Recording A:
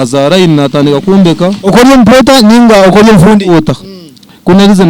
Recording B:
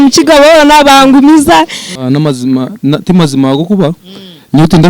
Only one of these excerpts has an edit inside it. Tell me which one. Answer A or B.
B